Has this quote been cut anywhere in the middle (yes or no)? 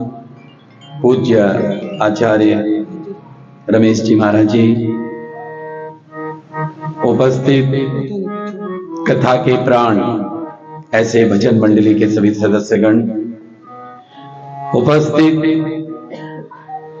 no